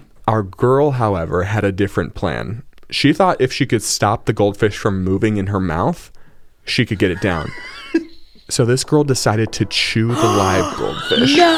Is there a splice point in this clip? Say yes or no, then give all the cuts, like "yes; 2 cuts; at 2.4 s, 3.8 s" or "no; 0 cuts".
no; 0 cuts